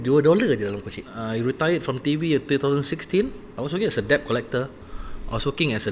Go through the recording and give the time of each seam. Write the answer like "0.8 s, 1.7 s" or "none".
1.2 s, 3.5 s